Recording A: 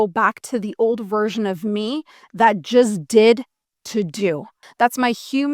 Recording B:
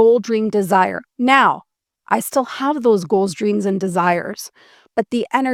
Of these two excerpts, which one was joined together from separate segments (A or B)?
A